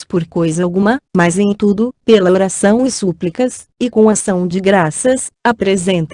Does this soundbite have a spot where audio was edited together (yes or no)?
no